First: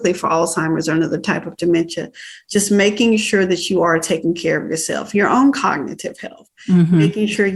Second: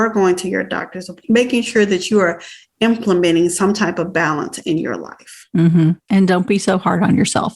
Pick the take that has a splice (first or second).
second